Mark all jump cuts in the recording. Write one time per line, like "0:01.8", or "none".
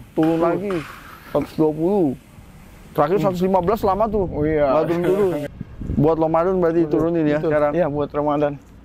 0:05.5